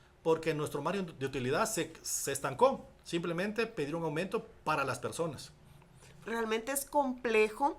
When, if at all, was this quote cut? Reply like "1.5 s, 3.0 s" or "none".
6.2 s